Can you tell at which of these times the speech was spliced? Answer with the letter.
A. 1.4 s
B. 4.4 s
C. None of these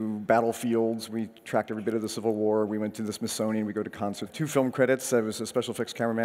C